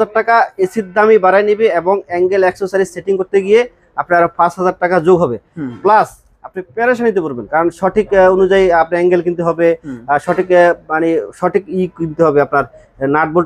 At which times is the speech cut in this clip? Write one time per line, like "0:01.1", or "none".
none